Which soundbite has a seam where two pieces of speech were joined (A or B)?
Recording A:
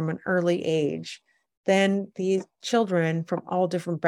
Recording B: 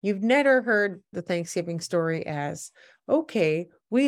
B